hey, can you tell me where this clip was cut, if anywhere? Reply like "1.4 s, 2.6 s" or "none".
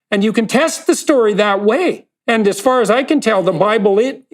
2.1 s